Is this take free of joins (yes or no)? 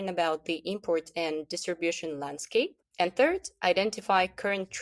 no